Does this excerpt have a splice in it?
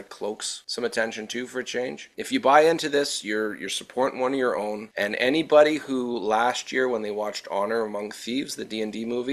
no; 0 cuts

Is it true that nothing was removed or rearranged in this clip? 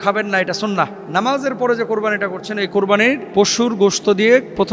no; 2 cuts; at 1.0 s, 3.2 s

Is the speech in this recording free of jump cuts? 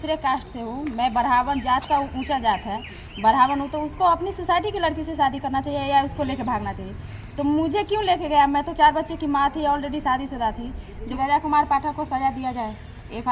no; 1 cut; at 11.1 s

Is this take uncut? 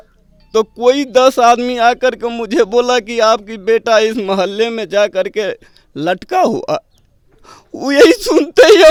yes; 0 cuts

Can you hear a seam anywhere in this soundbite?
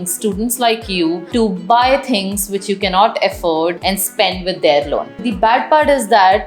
yes; 3 cuts; at 1.2 s, 3.8 s, 5.3 s

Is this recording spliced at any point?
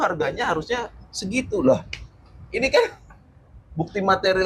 no; 0 cuts

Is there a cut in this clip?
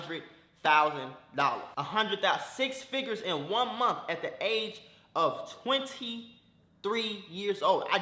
yes; 1 cut; at 1.7 s

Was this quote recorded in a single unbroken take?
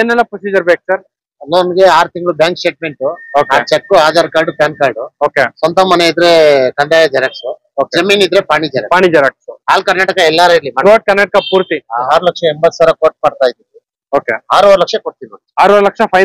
no; 1 cut; at 12.1 s

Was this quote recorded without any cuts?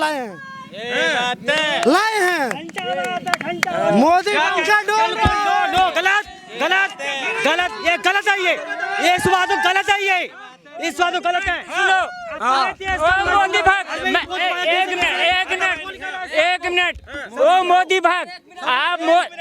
yes; 0 cuts

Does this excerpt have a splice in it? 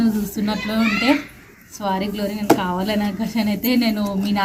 no; 0 cuts

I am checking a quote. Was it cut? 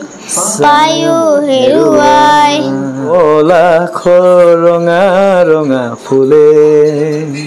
yes; 1 cut; at 3.1 s

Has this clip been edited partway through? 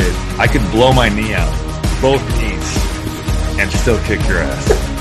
no; 0 cuts

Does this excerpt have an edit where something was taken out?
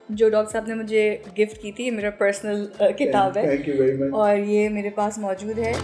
no; 0 cuts

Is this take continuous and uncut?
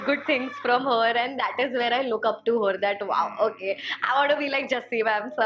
yes; 0 cuts

